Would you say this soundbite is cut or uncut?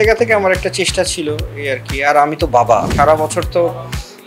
cut